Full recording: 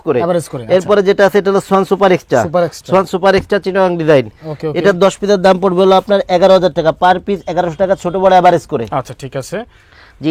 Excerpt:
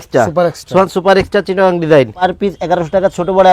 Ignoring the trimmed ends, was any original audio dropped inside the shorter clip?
yes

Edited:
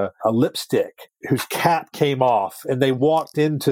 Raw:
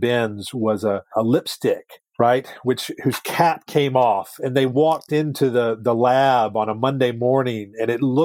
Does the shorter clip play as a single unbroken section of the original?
no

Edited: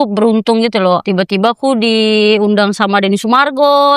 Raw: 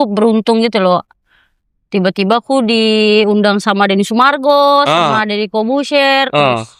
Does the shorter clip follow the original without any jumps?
no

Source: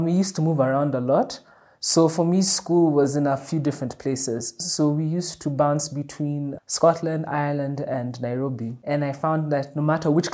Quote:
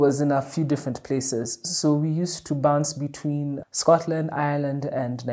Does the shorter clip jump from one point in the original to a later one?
no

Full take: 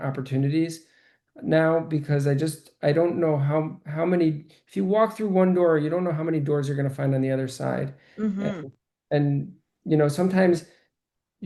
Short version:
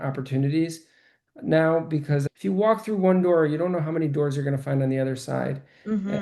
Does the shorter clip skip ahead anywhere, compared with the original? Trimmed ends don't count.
yes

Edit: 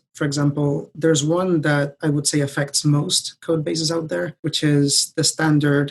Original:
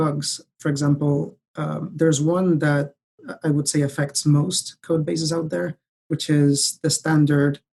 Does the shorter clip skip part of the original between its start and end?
yes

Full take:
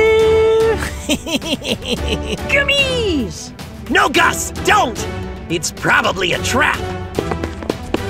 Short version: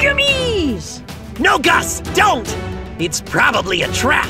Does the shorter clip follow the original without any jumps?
yes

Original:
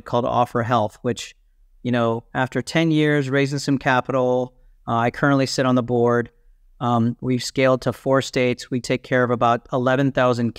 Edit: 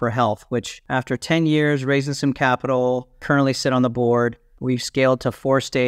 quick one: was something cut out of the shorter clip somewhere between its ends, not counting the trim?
yes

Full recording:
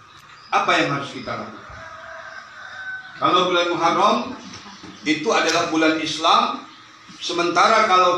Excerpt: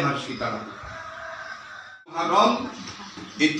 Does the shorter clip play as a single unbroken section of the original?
no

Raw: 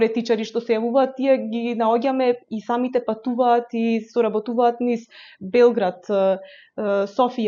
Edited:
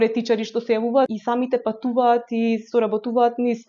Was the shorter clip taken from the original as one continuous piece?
no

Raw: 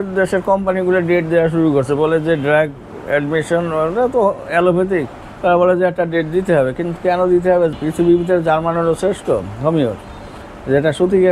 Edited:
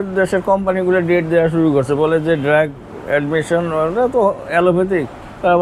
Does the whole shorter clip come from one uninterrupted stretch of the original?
yes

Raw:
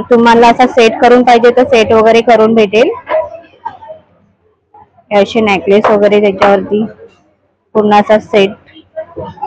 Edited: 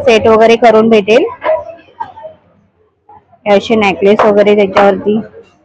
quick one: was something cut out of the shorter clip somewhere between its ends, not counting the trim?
no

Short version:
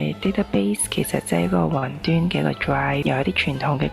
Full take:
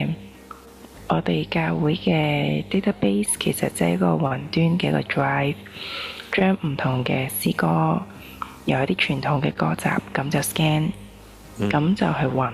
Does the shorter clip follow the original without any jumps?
no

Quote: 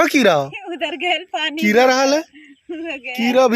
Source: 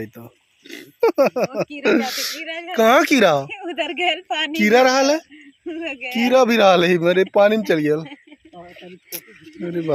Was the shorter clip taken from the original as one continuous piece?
yes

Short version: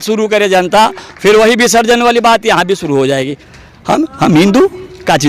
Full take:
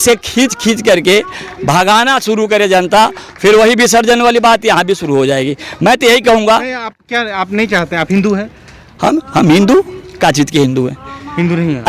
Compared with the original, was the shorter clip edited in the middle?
yes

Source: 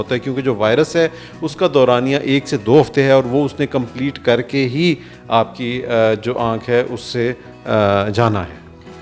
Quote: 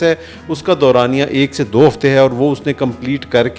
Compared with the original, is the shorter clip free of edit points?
yes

